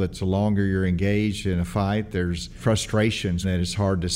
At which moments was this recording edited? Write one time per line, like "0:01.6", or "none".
0:02.6
0:03.4

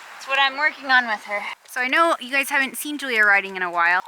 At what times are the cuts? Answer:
0:01.6

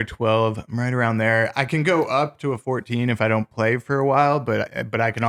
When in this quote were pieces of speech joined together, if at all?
none

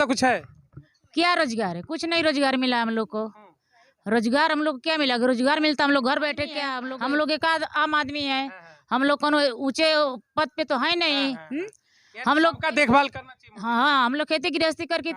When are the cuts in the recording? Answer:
0:06.7

